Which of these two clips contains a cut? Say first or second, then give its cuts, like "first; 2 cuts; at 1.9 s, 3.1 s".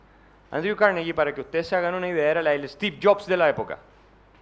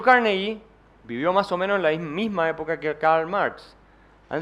second; 1 cut; at 2.8 s